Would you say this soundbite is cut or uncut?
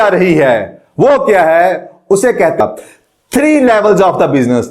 cut